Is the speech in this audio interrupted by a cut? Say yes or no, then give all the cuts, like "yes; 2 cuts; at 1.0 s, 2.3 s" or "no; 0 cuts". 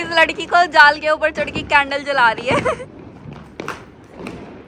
no; 0 cuts